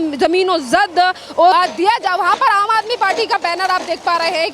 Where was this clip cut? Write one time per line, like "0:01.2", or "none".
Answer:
0:01.5

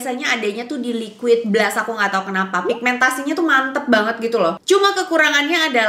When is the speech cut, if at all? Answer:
none

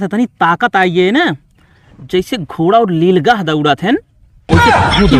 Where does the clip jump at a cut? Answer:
none

